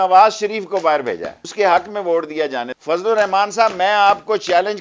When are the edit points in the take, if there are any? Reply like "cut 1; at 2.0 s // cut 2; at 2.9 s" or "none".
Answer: cut 1; at 1.4 s // cut 2; at 2.7 s